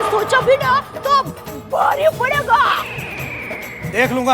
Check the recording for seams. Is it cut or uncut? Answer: uncut